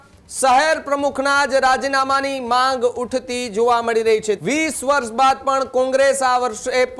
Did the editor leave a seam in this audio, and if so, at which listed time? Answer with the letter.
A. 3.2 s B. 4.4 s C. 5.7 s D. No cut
B